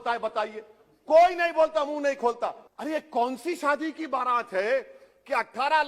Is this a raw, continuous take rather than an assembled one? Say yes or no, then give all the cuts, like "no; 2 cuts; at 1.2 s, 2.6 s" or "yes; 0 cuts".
no; 1 cut; at 2.7 s